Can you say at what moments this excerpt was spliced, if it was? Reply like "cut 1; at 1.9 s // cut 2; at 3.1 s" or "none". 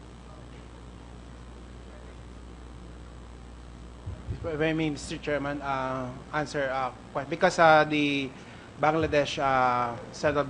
cut 1; at 1.8 s